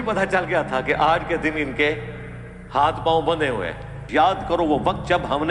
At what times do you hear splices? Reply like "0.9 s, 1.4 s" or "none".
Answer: 4.1 s